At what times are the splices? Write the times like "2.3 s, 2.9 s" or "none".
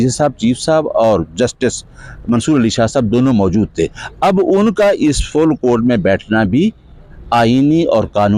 none